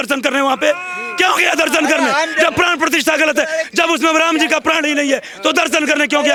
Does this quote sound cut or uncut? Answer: uncut